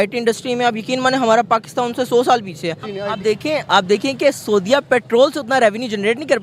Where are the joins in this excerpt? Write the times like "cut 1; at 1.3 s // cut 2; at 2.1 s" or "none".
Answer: cut 1; at 2.9 s